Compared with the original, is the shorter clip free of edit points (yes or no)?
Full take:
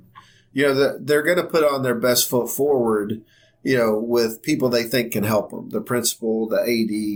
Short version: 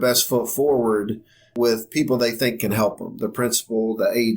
no